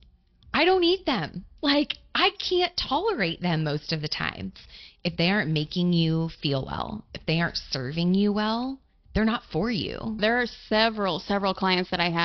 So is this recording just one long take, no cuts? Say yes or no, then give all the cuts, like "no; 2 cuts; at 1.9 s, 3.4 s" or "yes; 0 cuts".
no; 2 cuts; at 4.7 s, 10.2 s